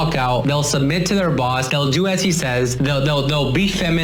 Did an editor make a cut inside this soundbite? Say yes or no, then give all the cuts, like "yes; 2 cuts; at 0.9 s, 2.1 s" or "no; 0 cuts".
no; 0 cuts